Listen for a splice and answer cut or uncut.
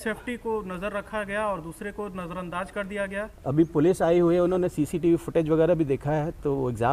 cut